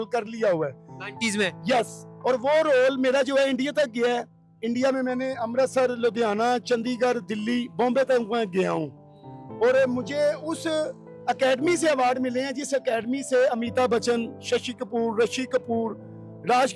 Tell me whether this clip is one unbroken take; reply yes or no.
yes